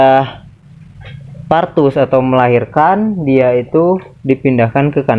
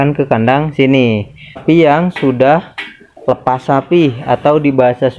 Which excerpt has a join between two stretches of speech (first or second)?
second